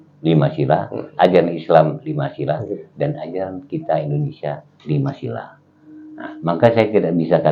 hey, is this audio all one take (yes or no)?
yes